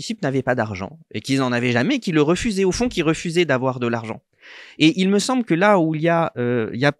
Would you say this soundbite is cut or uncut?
uncut